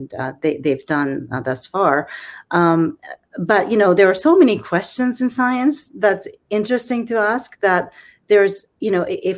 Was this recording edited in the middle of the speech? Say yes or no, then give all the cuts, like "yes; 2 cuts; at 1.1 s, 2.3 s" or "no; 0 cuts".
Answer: no; 0 cuts